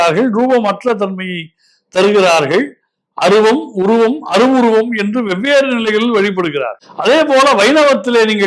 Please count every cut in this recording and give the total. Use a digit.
1